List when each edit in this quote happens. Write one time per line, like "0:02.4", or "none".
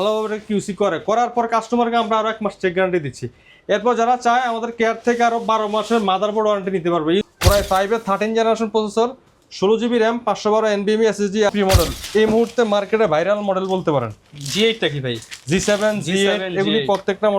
0:07.3
0:11.5